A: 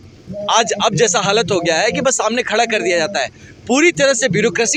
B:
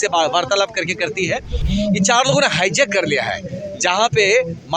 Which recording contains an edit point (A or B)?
B